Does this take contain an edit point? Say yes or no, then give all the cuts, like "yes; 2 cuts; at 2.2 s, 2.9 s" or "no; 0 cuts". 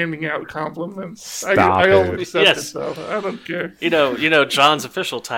no; 0 cuts